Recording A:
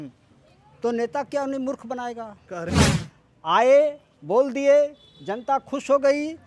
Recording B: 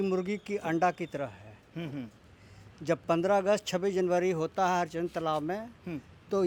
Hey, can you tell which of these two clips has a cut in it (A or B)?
A